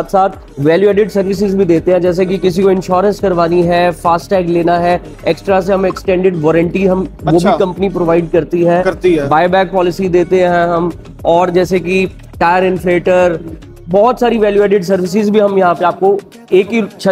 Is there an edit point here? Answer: no; 0 cuts

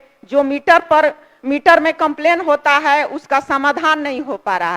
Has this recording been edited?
no; 0 cuts

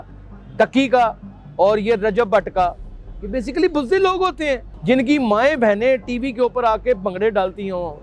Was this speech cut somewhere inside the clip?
yes; 1 cut; at 4.7 s

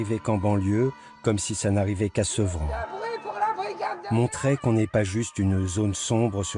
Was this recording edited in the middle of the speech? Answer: no; 0 cuts

